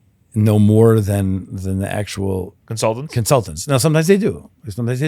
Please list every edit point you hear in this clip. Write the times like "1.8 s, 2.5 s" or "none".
2.6 s